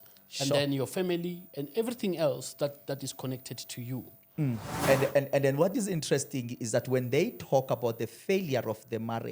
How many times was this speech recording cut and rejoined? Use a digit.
1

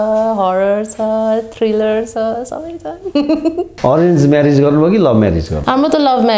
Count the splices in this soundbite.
1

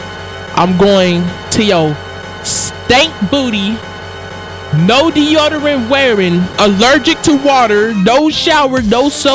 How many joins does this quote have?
0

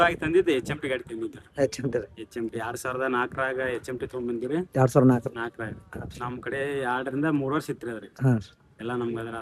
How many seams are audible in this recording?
0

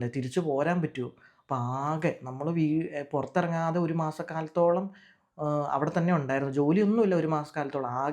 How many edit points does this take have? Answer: 0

